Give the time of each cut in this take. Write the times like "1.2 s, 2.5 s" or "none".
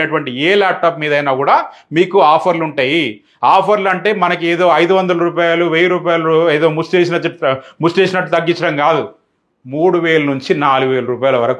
none

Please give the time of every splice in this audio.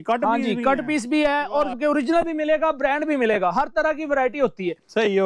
1.8 s

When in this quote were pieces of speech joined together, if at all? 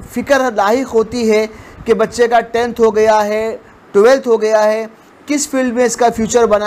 none

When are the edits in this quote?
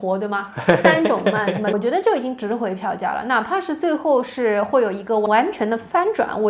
1.7 s

